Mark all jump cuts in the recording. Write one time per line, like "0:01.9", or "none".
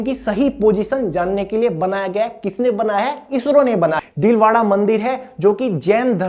0:04.0